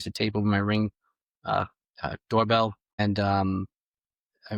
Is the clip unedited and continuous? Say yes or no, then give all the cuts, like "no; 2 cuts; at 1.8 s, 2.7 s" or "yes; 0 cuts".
no; 1 cut; at 3.0 s